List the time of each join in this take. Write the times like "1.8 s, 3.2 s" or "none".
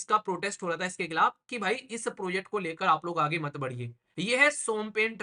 4.0 s